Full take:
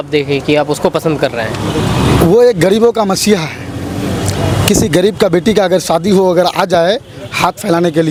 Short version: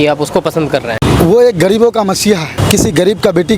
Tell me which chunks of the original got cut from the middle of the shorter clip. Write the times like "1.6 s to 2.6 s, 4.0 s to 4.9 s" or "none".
1.5 s to 2.0 s, 3.6 s to 4.5 s